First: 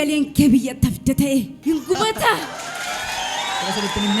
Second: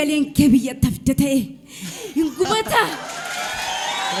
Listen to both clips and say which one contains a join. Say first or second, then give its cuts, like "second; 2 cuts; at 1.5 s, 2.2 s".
first; 1 cut; at 1.5 s